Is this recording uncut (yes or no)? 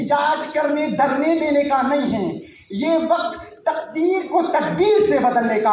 yes